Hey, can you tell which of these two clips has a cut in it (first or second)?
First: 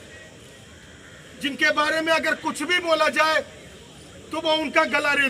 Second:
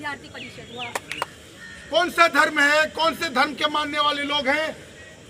second